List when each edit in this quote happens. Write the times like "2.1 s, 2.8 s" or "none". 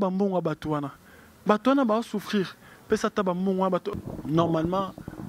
3.9 s